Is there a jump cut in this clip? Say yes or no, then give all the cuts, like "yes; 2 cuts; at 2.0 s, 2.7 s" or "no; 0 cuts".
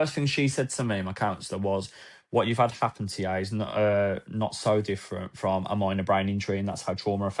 no; 0 cuts